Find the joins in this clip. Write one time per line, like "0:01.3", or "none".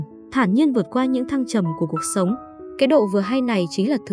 0:02.6

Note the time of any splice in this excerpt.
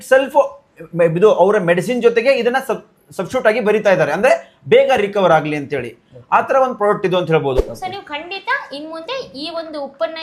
0:07.6

